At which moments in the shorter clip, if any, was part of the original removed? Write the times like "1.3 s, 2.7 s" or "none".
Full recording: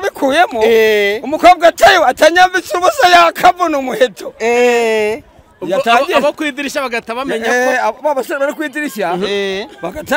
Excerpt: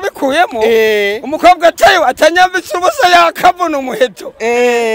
none